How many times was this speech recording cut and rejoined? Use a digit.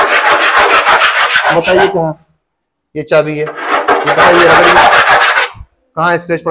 0